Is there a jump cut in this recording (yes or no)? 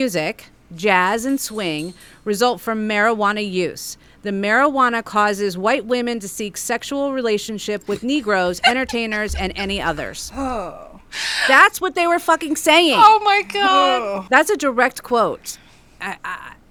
no